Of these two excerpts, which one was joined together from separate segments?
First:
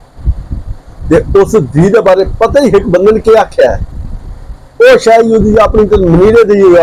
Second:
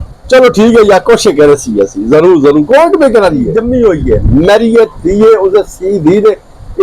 second; 1 cut; at 3.6 s

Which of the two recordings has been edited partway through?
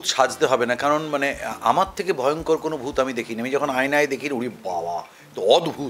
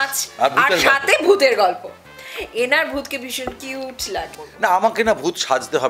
second; 1 cut; at 4.4 s

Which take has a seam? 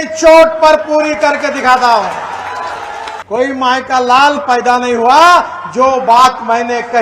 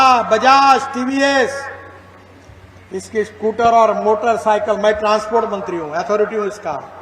first; 1 cut; at 3.1 s

